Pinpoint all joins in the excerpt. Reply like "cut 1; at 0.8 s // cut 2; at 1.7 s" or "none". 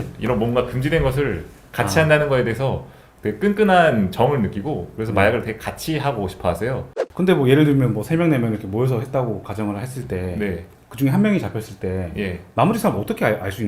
cut 1; at 6.9 s